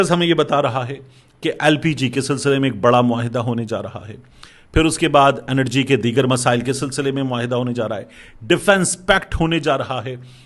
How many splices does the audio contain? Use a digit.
0